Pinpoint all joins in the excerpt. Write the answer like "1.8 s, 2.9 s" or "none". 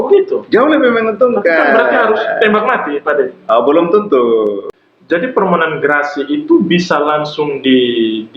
4.7 s